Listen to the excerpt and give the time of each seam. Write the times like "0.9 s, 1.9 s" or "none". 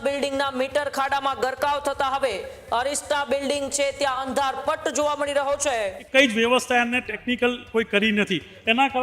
6.0 s